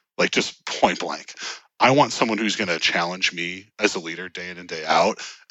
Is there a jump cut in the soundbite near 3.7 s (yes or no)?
no